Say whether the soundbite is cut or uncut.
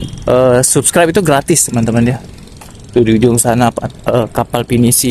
uncut